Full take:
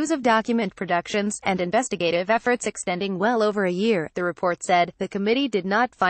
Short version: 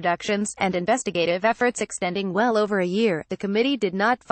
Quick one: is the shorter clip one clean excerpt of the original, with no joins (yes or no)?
no